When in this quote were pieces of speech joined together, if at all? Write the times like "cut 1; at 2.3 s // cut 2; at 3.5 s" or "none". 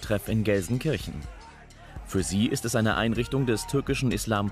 none